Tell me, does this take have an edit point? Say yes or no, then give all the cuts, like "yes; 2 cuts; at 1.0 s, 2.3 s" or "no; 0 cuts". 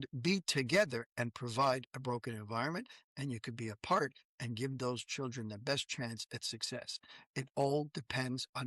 no; 0 cuts